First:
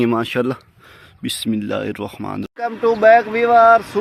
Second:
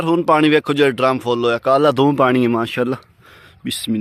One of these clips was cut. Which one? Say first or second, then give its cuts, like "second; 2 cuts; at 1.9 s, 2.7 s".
first; 1 cut; at 2.5 s